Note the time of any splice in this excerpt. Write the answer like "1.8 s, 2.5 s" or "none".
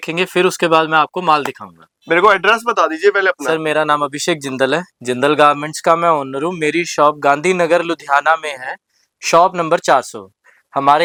none

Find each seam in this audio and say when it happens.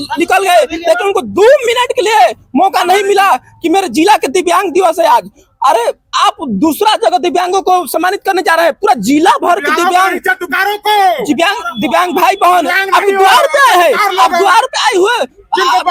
none

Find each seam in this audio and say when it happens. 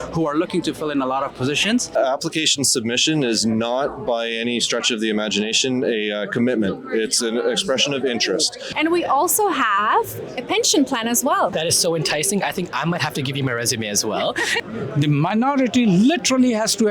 1.9 s, 8.6 s, 11.5 s, 14.6 s

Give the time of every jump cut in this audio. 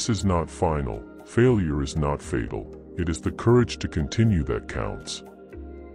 5.0 s

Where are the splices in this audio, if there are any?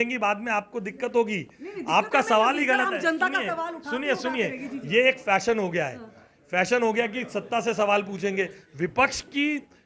none

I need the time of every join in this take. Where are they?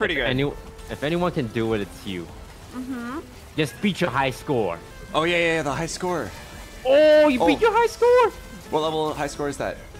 3.4 s, 4.9 s

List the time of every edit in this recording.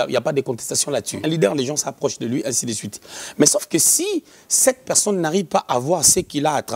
1.2 s

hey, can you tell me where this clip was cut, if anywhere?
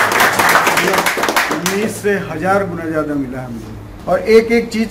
3.9 s

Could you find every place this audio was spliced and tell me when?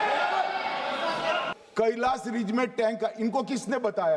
1.5 s

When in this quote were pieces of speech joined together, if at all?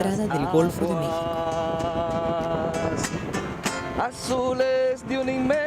1.7 s

